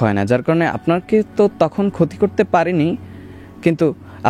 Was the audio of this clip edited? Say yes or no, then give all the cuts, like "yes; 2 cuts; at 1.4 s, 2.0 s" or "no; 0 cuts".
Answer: no; 0 cuts